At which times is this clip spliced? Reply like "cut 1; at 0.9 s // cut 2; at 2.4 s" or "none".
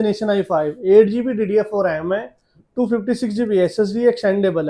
none